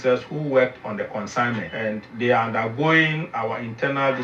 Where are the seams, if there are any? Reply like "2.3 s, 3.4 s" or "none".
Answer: 2.0 s